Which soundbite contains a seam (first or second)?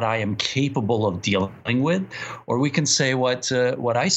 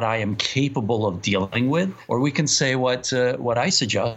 second